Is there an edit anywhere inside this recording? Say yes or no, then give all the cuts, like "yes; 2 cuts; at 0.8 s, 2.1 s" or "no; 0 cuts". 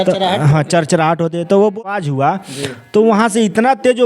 yes; 1 cut; at 1.9 s